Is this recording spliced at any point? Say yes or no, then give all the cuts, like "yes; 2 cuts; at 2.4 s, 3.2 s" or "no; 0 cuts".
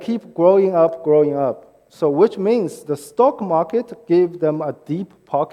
no; 0 cuts